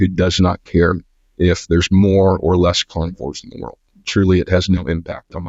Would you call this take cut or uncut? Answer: uncut